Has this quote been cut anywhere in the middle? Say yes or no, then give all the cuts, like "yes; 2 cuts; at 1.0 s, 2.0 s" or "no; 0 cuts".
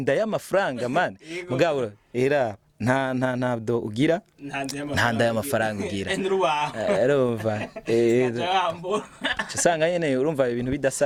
no; 0 cuts